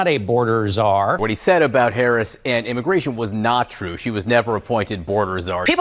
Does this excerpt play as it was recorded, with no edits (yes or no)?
yes